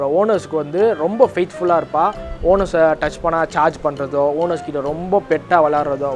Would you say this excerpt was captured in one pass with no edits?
yes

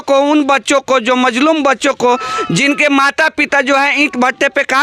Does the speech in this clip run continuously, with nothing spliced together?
yes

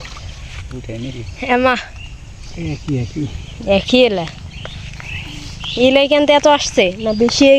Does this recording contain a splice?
no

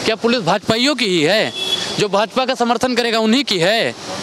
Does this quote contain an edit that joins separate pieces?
no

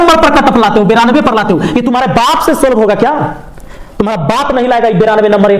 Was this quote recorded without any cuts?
yes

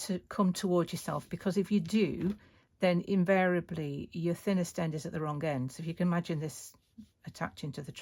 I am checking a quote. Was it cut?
no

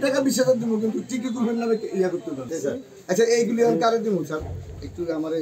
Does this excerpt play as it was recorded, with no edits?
no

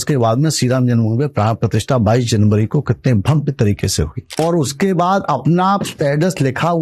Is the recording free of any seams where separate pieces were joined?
no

